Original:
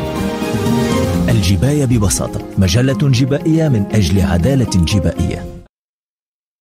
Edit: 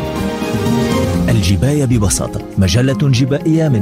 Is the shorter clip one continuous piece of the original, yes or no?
yes